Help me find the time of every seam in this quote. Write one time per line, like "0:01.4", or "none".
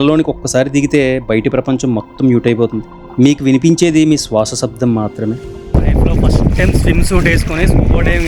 0:05.5